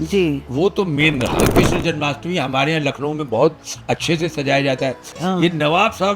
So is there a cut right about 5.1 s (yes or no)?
yes